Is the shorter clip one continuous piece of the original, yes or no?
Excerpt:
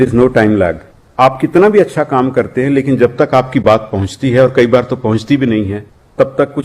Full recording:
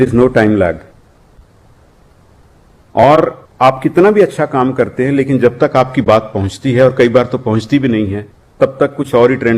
no